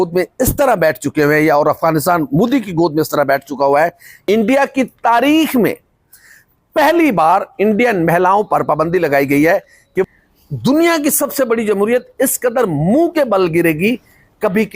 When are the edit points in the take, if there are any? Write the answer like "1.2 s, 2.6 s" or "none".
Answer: 4.1 s, 10.1 s

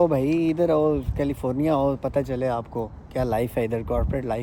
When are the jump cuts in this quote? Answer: none

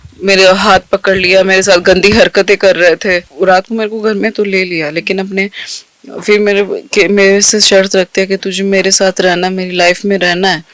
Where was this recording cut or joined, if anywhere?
3.3 s

